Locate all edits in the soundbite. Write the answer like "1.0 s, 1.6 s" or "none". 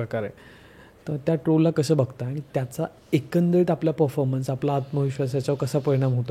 none